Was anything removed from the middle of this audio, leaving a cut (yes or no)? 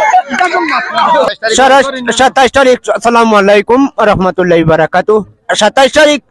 yes